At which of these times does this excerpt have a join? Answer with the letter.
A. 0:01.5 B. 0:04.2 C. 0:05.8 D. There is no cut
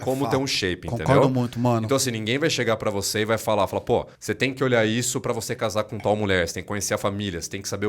B